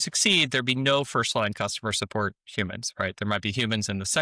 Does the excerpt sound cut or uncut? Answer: uncut